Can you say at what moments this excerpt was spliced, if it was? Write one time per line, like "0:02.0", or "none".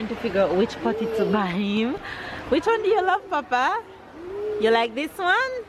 none